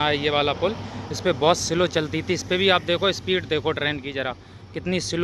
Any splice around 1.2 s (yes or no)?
no